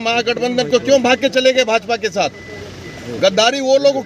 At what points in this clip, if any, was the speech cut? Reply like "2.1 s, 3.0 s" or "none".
none

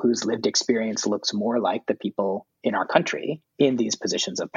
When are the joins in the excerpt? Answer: 2.5 s, 3.4 s

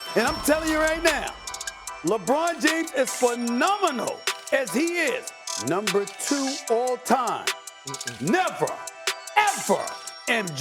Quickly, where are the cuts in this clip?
none

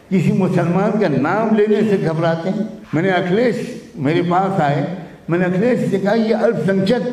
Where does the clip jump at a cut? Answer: 2.8 s

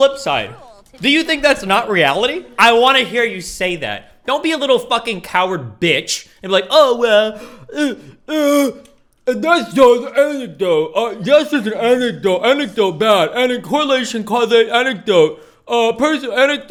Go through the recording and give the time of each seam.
none

